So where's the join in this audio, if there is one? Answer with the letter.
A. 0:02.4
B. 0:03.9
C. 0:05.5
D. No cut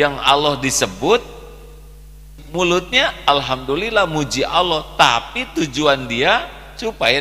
A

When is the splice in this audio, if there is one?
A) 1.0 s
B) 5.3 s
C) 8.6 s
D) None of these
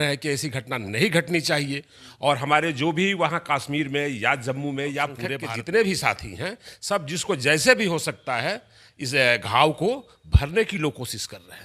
B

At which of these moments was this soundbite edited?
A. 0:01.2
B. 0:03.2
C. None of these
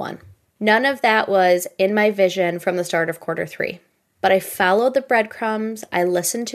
C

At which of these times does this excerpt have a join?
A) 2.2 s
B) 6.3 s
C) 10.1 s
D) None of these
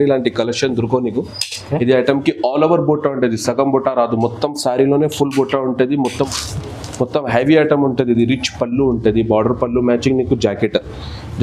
B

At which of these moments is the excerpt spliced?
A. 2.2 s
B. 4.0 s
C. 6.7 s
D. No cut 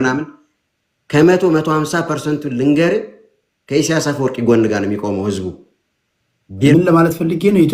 C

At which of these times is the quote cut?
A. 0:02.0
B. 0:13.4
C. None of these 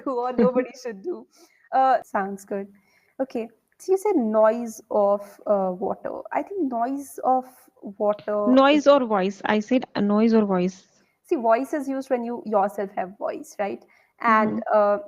A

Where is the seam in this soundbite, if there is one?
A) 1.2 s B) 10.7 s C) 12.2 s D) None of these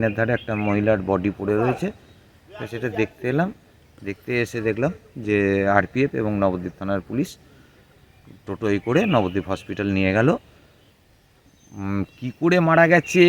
D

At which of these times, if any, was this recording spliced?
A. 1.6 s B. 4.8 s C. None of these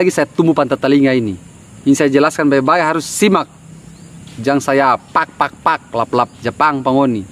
C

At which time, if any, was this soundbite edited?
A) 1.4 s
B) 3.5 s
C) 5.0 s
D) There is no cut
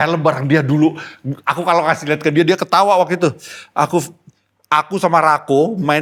D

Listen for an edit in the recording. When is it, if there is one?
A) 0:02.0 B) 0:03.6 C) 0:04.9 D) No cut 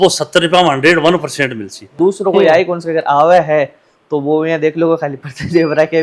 A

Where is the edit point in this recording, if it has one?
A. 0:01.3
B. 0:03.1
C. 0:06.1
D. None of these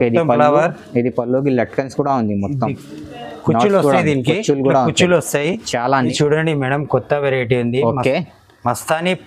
C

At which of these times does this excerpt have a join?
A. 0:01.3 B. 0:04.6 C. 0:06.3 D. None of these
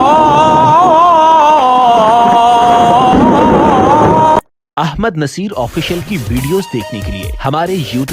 B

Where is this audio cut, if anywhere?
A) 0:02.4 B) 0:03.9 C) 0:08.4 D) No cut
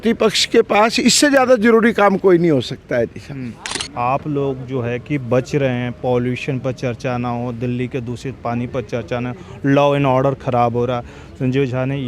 B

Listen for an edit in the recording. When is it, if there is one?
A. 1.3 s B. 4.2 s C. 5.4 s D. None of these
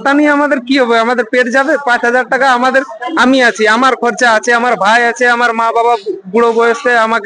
D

